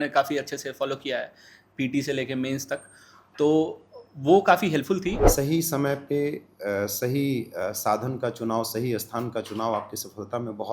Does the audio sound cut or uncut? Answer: cut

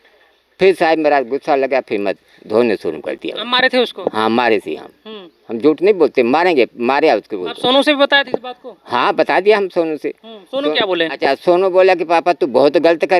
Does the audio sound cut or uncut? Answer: uncut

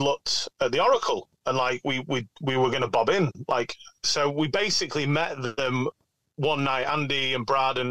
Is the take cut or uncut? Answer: uncut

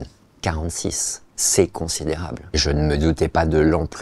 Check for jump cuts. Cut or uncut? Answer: cut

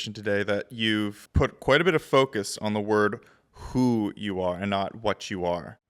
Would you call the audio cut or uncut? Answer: cut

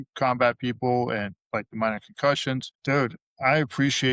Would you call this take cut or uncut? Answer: cut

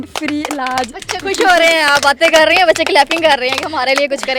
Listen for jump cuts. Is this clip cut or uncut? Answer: uncut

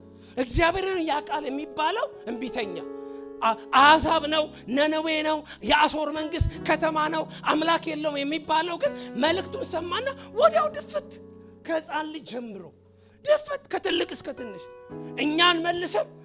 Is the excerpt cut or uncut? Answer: uncut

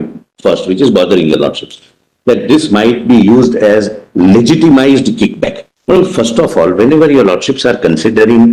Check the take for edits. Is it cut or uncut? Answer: uncut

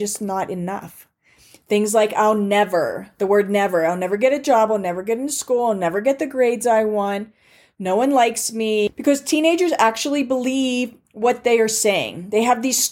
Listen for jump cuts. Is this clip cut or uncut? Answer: cut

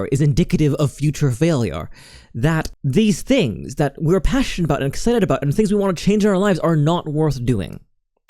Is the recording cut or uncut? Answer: uncut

